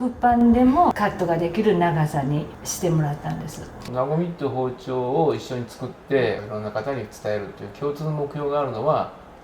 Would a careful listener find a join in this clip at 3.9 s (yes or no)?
yes